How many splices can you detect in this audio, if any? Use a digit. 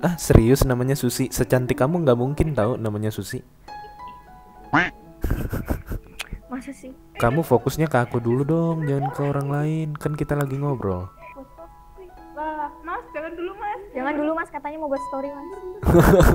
2